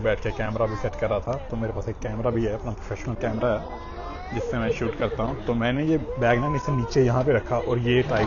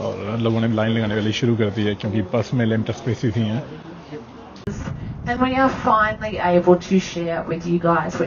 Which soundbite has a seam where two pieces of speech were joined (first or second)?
second